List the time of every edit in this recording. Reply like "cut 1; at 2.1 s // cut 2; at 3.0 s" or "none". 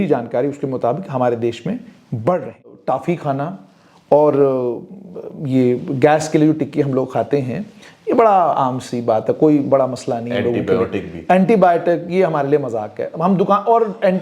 cut 1; at 2.8 s